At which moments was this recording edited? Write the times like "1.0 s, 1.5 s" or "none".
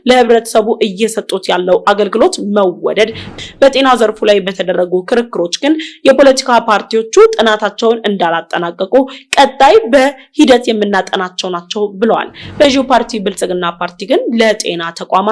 3.3 s, 12.6 s